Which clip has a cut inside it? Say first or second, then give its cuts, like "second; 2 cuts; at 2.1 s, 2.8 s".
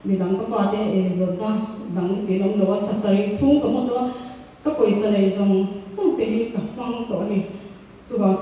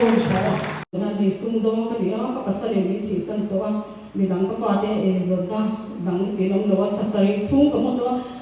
second; 1 cut; at 0.9 s